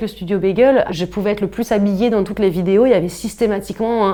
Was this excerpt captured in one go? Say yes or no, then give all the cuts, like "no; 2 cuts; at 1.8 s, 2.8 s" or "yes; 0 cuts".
yes; 0 cuts